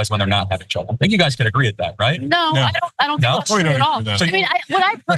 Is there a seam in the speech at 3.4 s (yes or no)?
yes